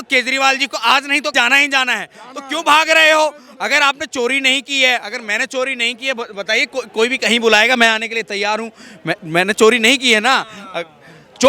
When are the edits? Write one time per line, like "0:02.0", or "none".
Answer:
0:01.3